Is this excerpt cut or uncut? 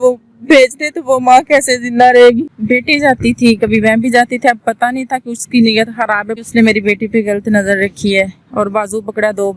cut